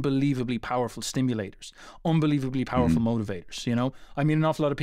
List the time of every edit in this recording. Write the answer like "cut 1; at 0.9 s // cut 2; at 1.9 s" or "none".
none